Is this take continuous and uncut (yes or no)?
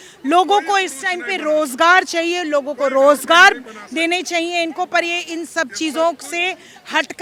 yes